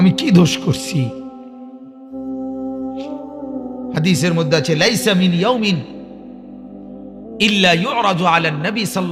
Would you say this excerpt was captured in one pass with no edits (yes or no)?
yes